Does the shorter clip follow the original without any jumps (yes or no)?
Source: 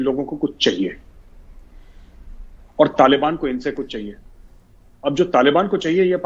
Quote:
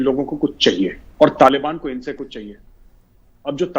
no